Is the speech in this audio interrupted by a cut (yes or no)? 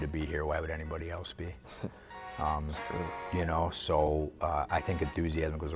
no